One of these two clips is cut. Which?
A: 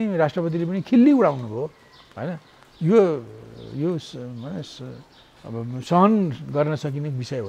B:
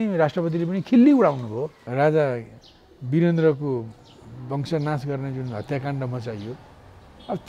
B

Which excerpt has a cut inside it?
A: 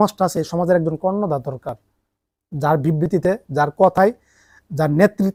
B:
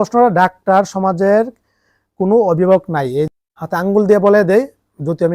B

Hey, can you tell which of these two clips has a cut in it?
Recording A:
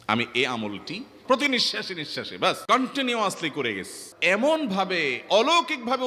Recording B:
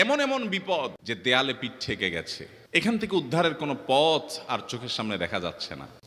A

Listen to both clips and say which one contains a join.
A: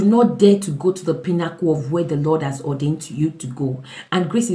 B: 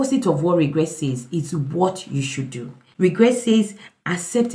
B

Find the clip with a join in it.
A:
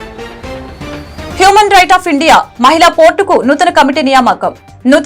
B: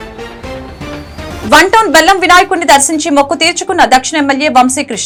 A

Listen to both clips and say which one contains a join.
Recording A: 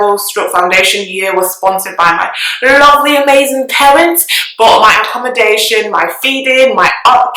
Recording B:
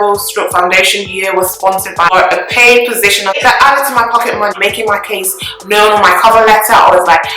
B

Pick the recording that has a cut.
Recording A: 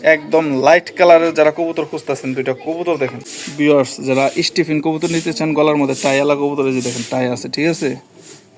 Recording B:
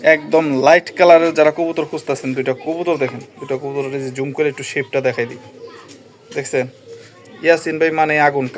A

